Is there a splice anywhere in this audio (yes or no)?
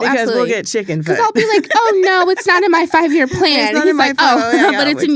no